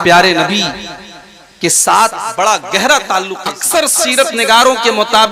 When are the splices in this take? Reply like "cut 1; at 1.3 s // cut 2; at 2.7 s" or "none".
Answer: cut 1; at 3.6 s

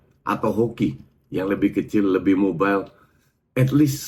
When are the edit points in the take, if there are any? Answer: none

